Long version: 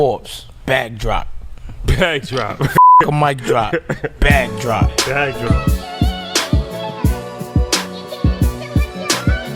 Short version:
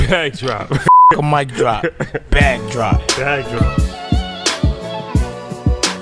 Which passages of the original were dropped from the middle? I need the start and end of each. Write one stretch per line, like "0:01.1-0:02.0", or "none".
none